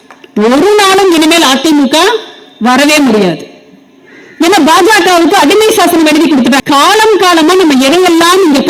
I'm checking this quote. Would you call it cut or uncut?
cut